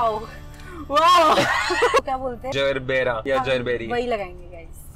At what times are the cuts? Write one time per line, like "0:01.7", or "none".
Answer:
0:02.0
0:03.2